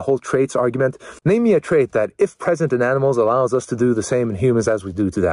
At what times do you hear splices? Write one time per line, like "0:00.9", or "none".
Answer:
none